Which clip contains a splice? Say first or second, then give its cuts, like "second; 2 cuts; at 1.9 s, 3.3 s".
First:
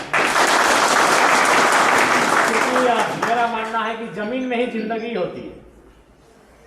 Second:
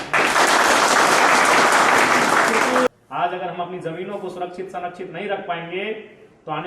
second; 1 cut; at 2.9 s